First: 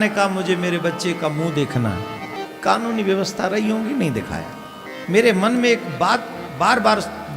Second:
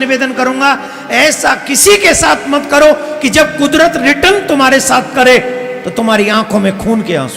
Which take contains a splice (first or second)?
first